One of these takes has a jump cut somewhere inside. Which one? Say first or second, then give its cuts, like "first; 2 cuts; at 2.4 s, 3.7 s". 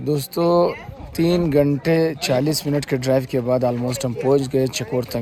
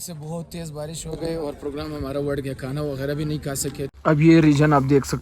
second; 1 cut; at 3.9 s